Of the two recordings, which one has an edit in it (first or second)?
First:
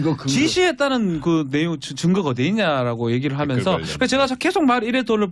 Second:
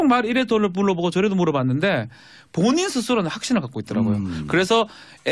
second